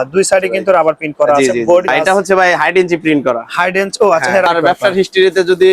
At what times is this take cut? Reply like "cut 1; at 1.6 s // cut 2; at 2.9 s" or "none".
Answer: cut 1; at 1.9 s // cut 2; at 4.5 s